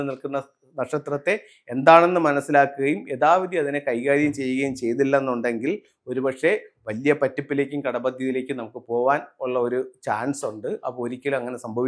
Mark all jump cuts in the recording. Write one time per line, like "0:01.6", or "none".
none